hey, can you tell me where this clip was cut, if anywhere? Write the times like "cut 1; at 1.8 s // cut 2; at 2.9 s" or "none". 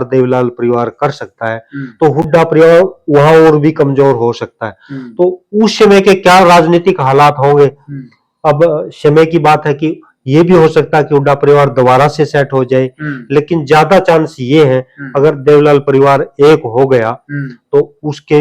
none